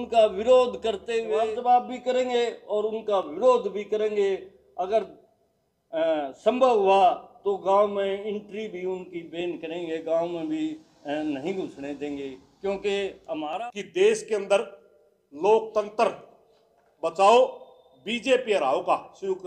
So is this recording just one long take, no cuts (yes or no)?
no